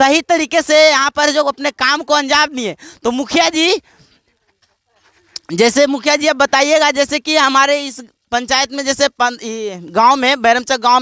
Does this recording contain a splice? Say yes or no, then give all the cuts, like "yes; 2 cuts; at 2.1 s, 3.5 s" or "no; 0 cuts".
no; 0 cuts